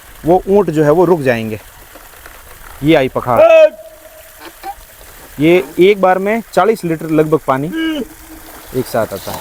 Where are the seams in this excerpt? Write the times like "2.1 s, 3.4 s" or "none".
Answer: none